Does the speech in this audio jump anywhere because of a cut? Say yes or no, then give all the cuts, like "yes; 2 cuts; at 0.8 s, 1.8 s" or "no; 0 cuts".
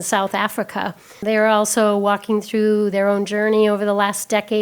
yes; 1 cut; at 1.2 s